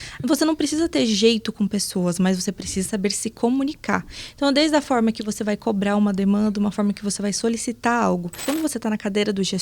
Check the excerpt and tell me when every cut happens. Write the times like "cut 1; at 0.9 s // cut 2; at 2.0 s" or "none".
cut 1; at 8.4 s